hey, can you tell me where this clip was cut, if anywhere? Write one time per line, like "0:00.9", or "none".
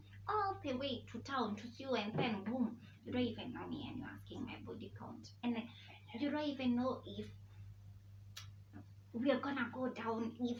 none